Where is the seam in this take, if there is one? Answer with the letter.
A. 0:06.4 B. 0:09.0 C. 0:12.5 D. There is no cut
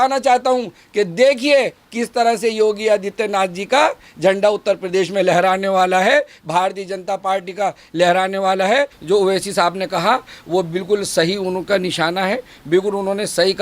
B